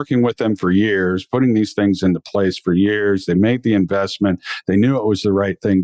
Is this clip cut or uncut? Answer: uncut